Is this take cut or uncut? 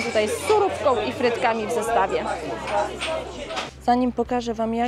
uncut